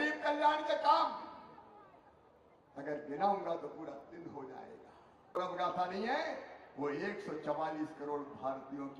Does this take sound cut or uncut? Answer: cut